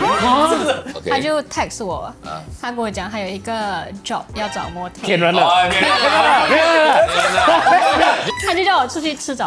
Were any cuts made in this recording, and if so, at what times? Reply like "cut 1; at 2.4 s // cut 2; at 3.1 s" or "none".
cut 1; at 0.9 s